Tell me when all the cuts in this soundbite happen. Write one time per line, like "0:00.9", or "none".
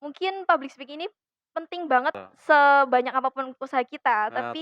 0:02.2